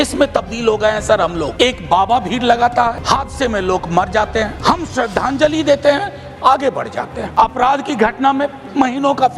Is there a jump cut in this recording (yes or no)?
yes